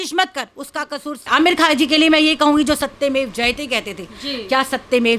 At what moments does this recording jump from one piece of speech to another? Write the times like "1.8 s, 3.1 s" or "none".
1.2 s